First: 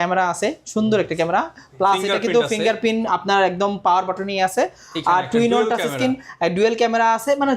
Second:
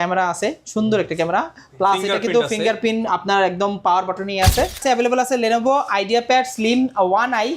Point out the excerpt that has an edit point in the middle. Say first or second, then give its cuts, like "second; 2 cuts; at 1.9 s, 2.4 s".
second; 1 cut; at 4.8 s